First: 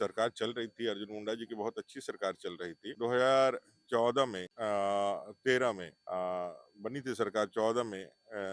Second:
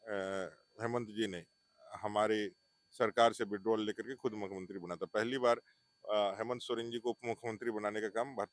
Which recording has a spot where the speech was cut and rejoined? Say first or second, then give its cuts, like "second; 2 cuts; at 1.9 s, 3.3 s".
first; 3 cuts; at 2.9 s, 4.5 s, 5.9 s